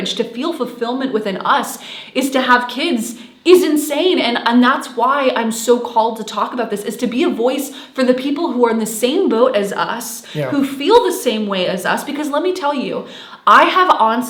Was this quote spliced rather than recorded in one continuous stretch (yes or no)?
no